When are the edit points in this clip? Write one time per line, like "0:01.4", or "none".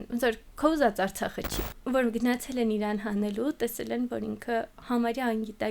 0:01.4